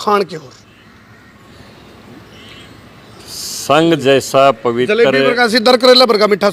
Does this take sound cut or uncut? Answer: uncut